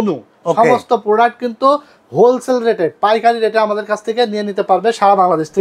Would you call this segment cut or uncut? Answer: uncut